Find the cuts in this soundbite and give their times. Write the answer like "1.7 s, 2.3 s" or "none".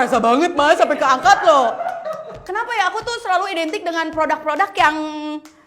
2.4 s